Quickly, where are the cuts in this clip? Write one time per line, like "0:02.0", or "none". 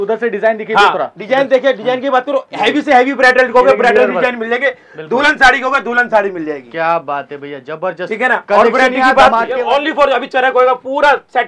0:09.6

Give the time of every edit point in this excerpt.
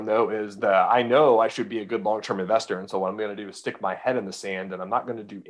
none

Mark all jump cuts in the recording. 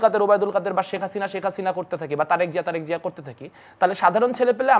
none

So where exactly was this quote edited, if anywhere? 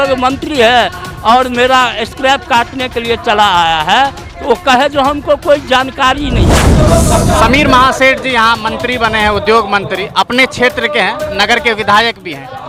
0:06.6

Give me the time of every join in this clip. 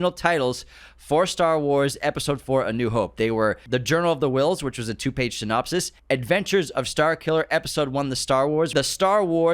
0:03.6
0:05.9
0:08.7

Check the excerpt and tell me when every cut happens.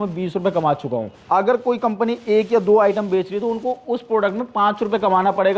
0:01.1

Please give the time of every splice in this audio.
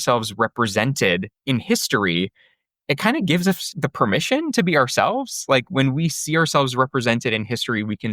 0:01.3
0:03.7

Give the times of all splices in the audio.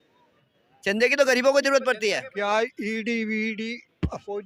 0:02.3

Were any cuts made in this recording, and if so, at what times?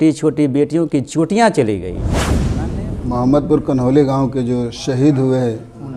0:02.4

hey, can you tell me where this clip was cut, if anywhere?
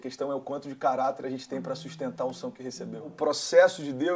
0:03.1

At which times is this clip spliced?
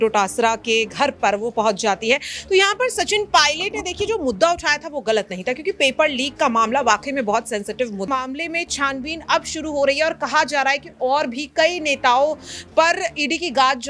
0:08.1

